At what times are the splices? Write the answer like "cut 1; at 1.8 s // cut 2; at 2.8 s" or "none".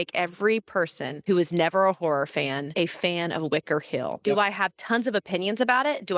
cut 1; at 1.1 s // cut 2; at 2.7 s // cut 3; at 4.2 s